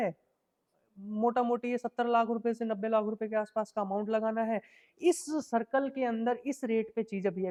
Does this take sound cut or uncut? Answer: uncut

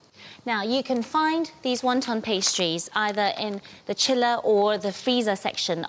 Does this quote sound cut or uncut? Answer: uncut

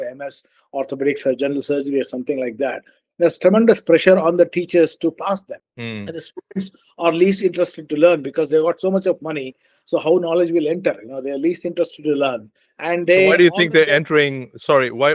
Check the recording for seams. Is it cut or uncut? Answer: cut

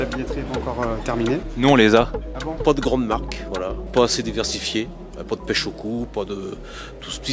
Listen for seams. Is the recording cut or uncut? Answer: cut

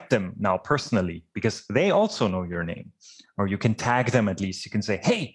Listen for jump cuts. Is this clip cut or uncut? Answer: uncut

